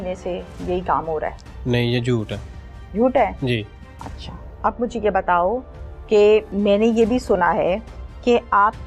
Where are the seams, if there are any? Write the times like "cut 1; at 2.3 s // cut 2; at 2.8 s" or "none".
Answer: none